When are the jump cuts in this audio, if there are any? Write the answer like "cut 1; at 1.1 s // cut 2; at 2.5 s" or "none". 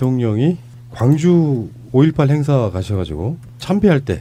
none